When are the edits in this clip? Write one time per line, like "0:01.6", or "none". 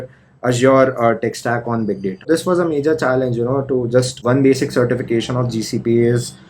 0:02.3
0:04.1